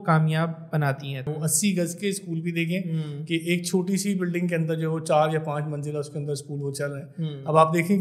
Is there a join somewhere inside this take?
yes; 1 cut; at 1.3 s

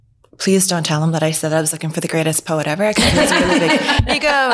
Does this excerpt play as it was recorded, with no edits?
yes; 0 cuts

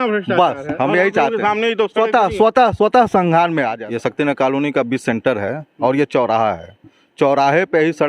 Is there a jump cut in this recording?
yes; 1 cut; at 3.8 s

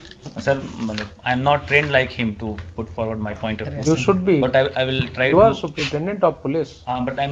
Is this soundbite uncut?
yes; 0 cuts

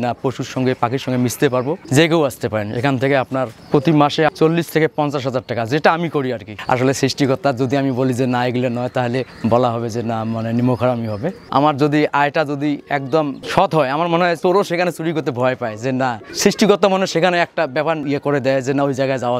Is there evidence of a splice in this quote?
yes; 6 cuts; at 6.5 s, 11.4 s, 13.4 s, 14.4 s, 16.3 s, 18.0 s

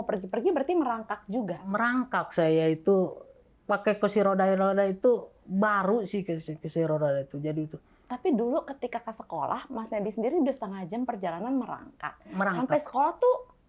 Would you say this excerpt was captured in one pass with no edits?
yes; 0 cuts

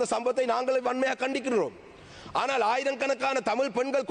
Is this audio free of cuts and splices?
yes; 0 cuts

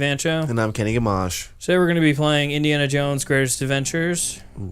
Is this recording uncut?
no; 1 cut; at 3.6 s

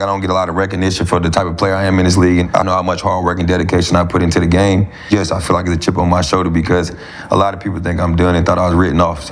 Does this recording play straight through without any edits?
no; 2 cuts; at 2.5 s, 5.1 s

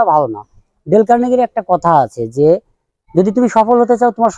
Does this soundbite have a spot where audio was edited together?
no; 0 cuts

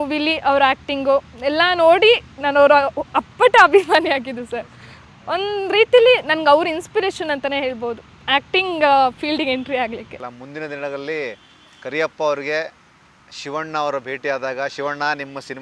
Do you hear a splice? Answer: no; 0 cuts

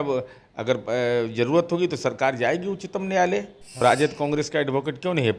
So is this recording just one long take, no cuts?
no; 1 cut; at 3.6 s

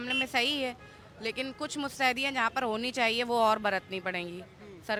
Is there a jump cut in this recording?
no; 0 cuts

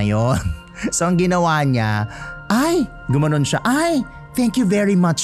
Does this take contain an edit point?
no; 0 cuts

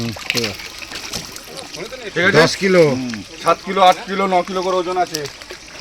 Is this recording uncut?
yes; 0 cuts

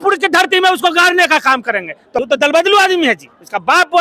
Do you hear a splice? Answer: yes; 1 cut; at 2.0 s

